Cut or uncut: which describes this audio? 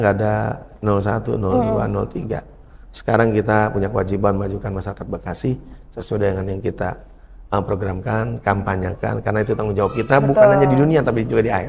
uncut